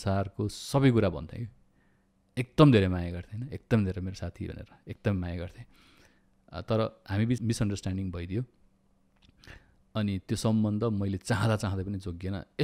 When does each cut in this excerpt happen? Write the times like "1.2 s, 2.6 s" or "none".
7.4 s